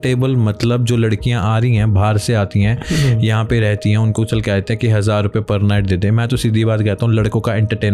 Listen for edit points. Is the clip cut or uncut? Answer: uncut